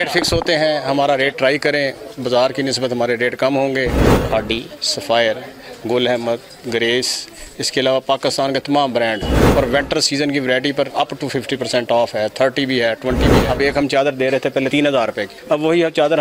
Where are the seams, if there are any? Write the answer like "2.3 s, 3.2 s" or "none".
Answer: 4.1 s, 10.9 s, 13.4 s, 14.8 s

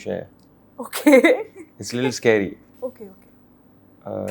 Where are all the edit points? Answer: none

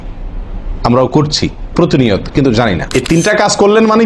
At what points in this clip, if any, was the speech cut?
2.8 s

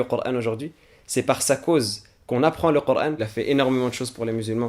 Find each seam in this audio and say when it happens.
3.3 s

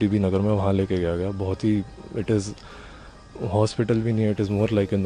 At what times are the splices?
none

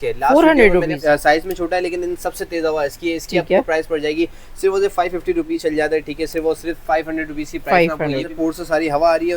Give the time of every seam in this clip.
1.0 s, 5.5 s, 8.3 s

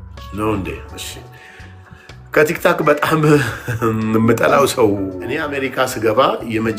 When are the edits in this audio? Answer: 5.5 s

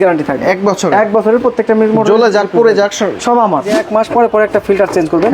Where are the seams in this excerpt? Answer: 3.8 s

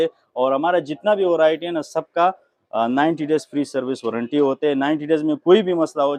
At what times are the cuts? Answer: none

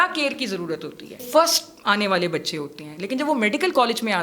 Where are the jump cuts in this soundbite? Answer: 1.2 s

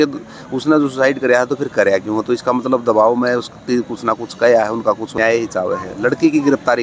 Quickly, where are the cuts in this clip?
5.1 s

